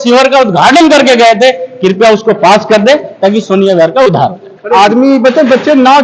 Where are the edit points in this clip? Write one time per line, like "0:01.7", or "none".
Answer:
0:04.4